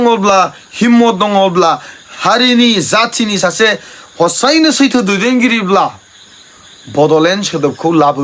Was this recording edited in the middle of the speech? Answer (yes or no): no